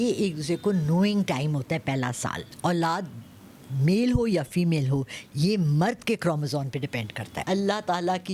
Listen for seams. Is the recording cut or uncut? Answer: cut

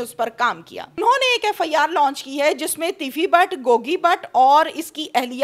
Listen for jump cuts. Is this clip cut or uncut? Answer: cut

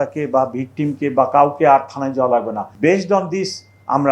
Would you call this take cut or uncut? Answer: cut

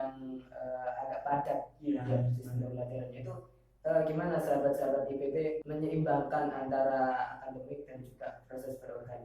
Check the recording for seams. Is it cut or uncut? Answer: cut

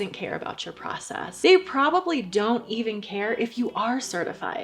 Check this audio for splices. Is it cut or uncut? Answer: cut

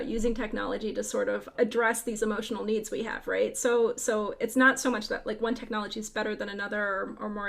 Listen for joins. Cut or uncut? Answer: cut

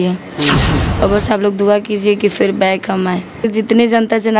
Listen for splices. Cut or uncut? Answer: cut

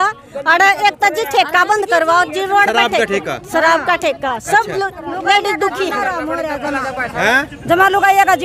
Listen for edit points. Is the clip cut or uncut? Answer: uncut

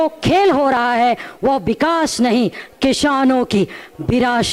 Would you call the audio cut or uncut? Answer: uncut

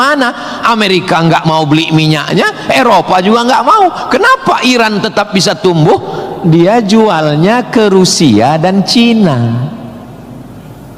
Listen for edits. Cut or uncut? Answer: cut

